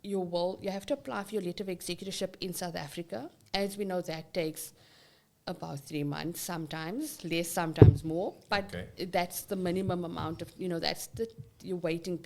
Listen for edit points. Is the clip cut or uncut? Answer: uncut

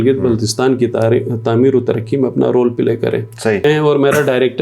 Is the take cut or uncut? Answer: cut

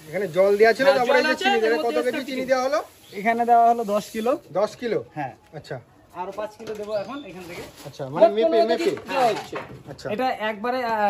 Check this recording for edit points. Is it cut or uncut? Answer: uncut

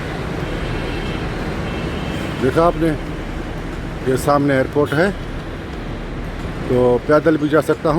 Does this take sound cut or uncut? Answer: uncut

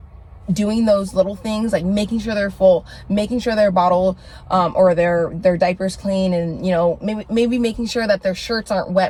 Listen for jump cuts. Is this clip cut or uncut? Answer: uncut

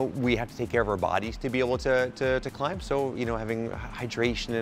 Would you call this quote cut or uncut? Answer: uncut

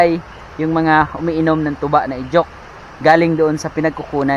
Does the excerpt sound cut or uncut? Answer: uncut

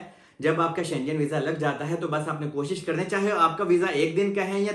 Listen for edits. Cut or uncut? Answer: uncut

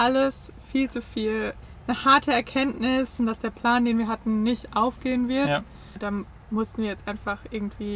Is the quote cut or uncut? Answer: cut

